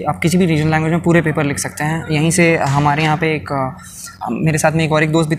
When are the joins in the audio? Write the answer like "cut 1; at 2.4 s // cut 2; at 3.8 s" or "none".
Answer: none

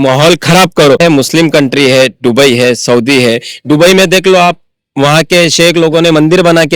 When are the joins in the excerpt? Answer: cut 1; at 1.0 s

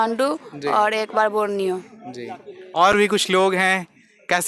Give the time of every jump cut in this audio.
none

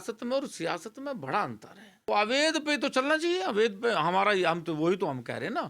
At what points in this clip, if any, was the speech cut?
cut 1; at 2.1 s

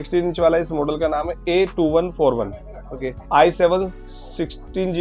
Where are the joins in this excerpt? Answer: none

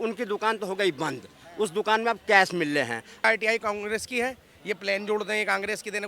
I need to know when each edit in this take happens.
cut 1; at 3.2 s

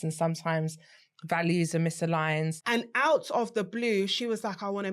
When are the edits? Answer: cut 1; at 2.5 s

